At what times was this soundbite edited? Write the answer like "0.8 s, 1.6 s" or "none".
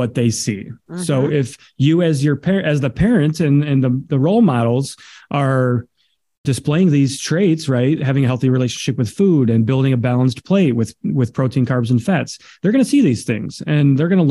none